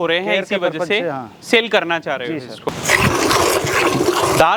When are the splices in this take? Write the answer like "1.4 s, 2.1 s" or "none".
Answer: 2.7 s